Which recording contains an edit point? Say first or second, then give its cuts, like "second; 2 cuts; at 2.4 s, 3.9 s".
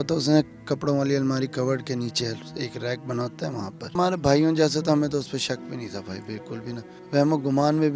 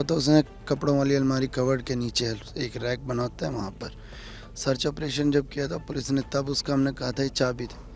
first; 2 cuts; at 3.9 s, 6.9 s